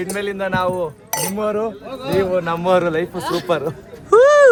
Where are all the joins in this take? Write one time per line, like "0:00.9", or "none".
none